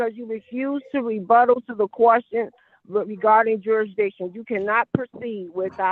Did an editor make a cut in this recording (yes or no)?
no